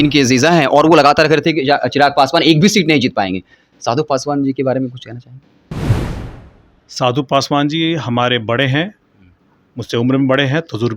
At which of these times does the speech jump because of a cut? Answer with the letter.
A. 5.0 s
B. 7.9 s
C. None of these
C